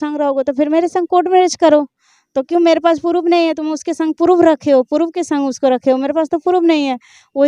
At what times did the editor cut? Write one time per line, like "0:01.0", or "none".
none